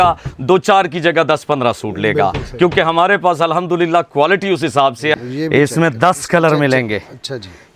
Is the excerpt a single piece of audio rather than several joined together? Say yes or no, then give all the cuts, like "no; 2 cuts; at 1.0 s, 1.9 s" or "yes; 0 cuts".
no; 1 cut; at 5.2 s